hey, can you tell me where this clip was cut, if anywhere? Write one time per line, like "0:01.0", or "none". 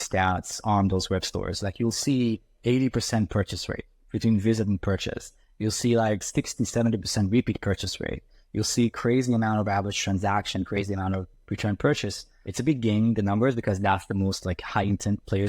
0:06.3